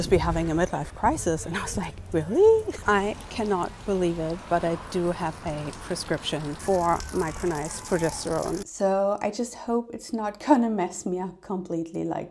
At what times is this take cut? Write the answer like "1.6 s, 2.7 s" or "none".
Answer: 2.7 s, 6.6 s, 8.7 s